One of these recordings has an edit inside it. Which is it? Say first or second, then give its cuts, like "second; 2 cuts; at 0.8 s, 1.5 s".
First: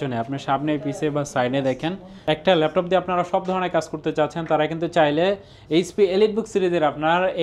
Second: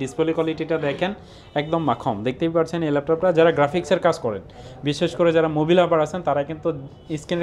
first; 1 cut; at 2.1 s